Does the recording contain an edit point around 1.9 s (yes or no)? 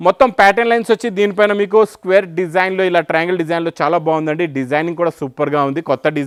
no